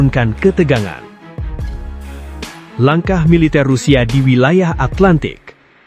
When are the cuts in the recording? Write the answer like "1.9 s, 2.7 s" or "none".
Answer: 1.2 s, 2.8 s

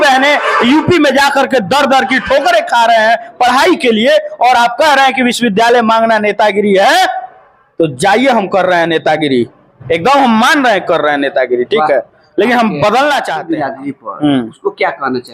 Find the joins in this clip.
13.4 s

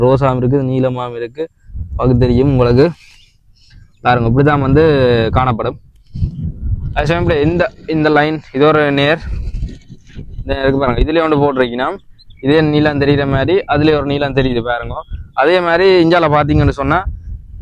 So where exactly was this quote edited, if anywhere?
none

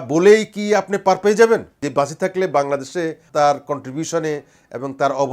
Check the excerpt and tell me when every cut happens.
1.8 s, 3.2 s

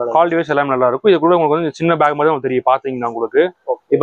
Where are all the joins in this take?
none

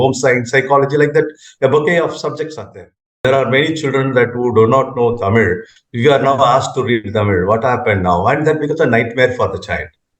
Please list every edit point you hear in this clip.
3.2 s

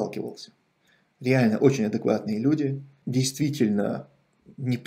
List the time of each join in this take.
2.9 s

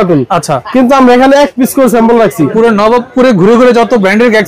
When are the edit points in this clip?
2.5 s

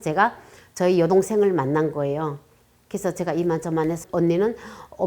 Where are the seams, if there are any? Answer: 4.0 s

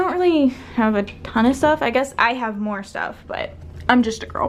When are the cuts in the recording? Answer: none

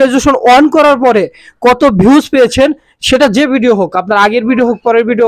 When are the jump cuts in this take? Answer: none

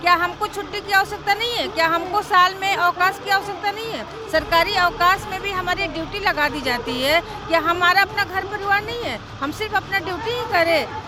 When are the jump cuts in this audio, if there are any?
none

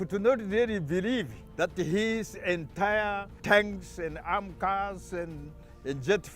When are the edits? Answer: 1.4 s, 3.3 s

